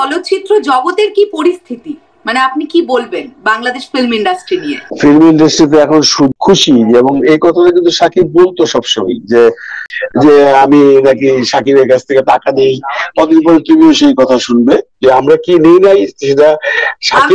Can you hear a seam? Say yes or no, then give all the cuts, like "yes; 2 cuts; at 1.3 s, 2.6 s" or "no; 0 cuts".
yes; 2 cuts; at 6.3 s, 9.8 s